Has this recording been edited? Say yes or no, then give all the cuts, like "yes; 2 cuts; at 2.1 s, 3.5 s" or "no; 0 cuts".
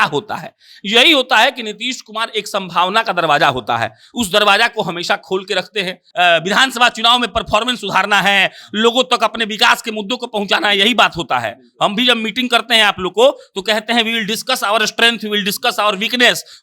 yes; 1 cut; at 6.0 s